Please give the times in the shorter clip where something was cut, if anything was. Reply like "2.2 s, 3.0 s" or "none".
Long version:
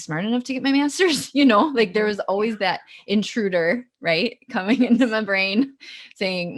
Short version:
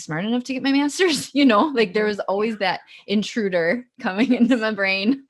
3.9 s